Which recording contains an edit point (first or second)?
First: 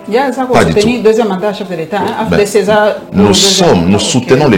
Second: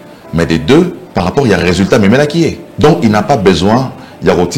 second